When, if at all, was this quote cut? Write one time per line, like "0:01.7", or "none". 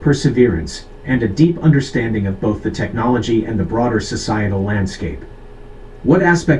none